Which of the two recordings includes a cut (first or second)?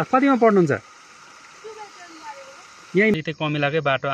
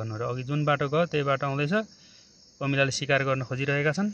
first